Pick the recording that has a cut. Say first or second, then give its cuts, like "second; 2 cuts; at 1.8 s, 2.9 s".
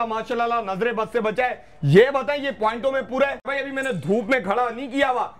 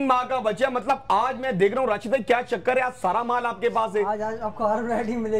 first; 1 cut; at 3.4 s